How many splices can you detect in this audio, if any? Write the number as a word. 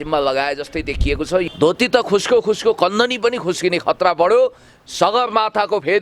one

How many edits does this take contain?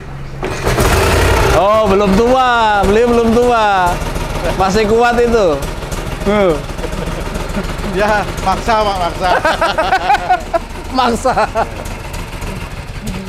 zero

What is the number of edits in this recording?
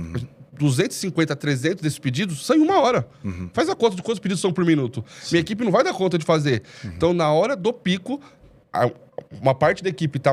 zero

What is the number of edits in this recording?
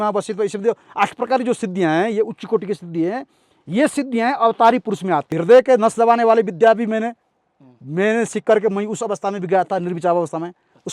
one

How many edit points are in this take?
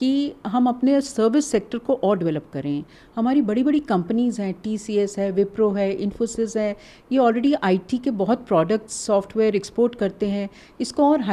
zero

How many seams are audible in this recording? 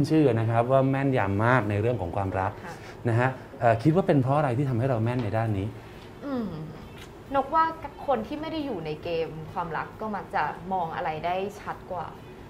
zero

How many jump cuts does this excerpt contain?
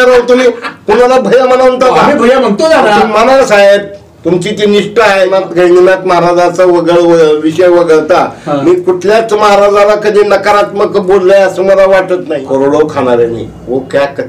two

